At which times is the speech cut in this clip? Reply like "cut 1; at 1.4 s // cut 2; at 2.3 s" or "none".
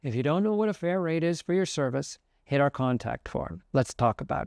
none